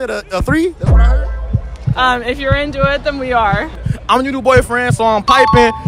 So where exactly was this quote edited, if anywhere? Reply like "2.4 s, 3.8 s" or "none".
3.8 s